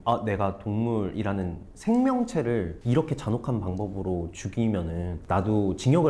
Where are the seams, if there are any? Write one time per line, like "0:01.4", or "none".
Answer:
0:02.8